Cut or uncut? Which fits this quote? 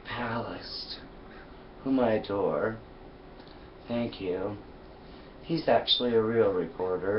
cut